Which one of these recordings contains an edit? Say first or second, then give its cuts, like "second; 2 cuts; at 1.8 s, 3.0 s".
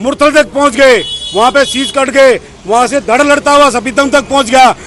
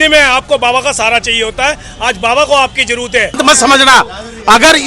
second; 1 cut; at 3.4 s